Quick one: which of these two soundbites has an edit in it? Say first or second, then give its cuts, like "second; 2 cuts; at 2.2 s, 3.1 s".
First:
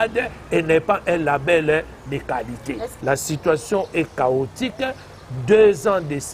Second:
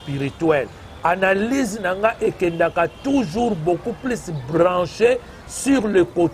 first; 1 cut; at 2.9 s